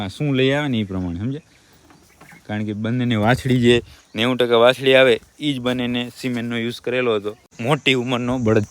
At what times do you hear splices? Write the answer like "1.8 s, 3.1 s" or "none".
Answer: 7.5 s

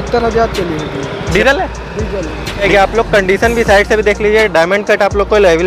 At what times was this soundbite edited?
1.3 s, 2.7 s

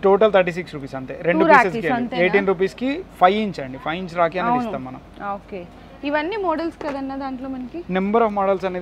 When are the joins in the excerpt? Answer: none

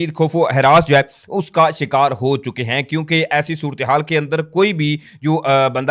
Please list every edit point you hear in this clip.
none

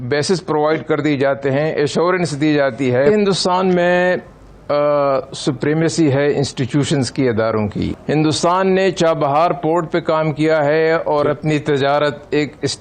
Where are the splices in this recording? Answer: 3.1 s, 8.0 s

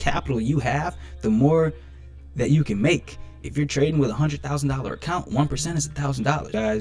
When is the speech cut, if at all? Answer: none

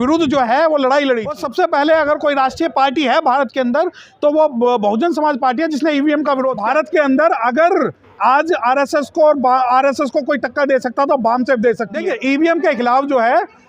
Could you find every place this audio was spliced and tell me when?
1.4 s, 6.6 s, 12.0 s

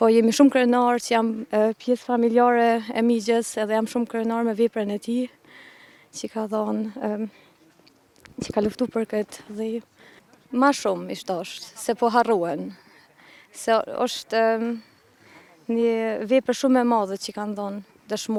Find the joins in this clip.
none

